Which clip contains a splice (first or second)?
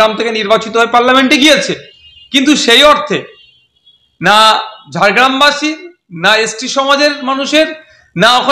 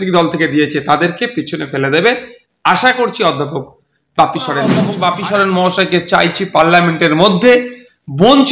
second